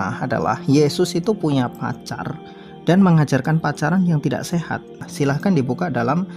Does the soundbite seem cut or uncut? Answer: cut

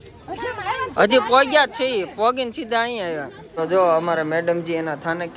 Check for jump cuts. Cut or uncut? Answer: cut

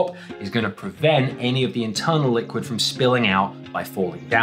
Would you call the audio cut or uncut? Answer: uncut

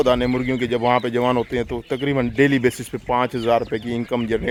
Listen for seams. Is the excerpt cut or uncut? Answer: uncut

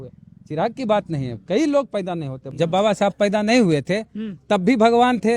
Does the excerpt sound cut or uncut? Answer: cut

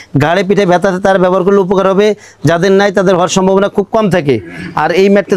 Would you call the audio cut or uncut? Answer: uncut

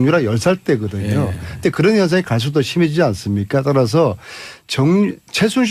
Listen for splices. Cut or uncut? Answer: cut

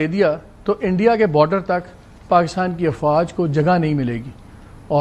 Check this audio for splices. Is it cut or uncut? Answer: uncut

